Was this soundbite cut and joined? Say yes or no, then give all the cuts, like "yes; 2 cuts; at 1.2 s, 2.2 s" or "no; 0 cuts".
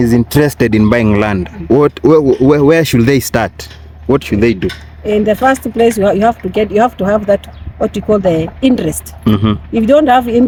no; 0 cuts